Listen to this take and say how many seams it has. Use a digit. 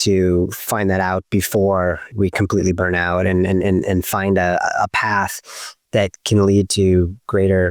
1